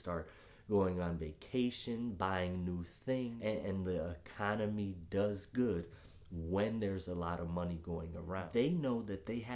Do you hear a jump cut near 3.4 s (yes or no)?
yes